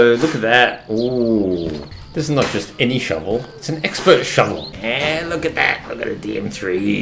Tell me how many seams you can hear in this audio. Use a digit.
2